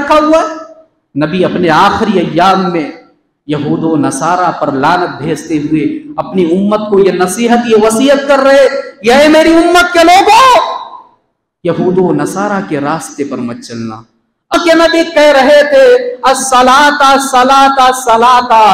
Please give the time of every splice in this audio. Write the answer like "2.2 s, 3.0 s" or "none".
14.5 s